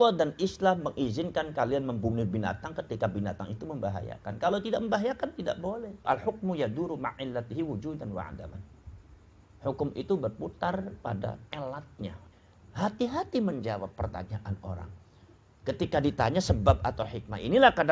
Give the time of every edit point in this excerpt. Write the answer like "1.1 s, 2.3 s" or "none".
6.0 s, 12.3 s